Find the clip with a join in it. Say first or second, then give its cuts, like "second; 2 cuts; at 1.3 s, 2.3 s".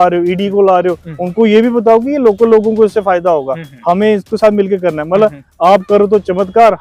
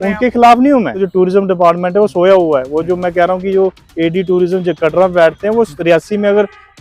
second; 1 cut; at 1.0 s